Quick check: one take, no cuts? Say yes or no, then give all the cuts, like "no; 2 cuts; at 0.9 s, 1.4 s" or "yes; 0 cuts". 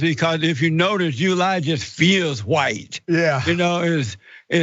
yes; 0 cuts